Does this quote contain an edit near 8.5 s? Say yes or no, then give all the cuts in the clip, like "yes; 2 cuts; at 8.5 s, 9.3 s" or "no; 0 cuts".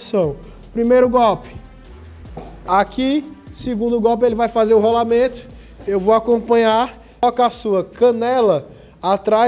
no; 1 cut; at 7.2 s